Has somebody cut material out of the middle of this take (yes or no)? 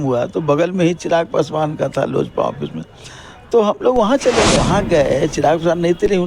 yes